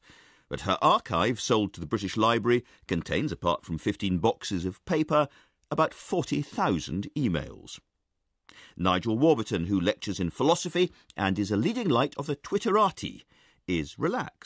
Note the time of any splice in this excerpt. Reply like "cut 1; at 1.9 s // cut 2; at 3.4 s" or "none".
cut 1; at 12.6 s